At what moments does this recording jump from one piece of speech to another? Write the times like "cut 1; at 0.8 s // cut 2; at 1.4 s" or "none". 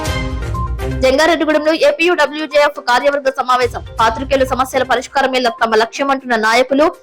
cut 1; at 0.9 s